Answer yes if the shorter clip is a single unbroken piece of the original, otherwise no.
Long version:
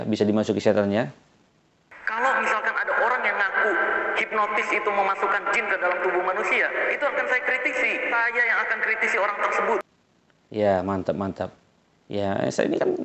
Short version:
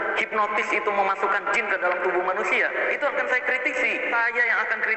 yes